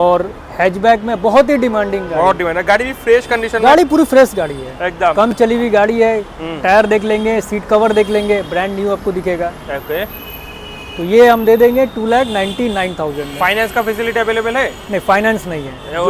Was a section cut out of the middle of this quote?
no; 0 cuts

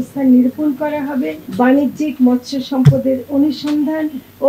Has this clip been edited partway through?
yes; 1 cut; at 1.4 s

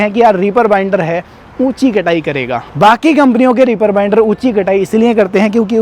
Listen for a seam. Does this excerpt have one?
no; 0 cuts

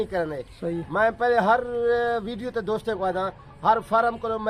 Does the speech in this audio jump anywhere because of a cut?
no; 0 cuts

